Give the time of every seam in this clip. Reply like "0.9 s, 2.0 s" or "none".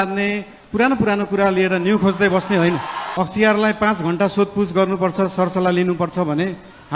3.0 s